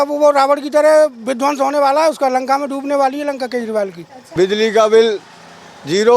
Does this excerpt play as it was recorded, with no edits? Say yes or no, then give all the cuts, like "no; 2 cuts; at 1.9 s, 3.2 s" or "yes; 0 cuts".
no; 1 cut; at 4.2 s